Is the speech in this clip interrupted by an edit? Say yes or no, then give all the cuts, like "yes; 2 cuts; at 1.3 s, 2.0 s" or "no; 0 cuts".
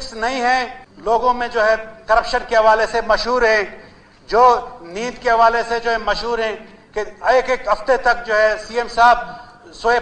yes; 1 cut; at 1.1 s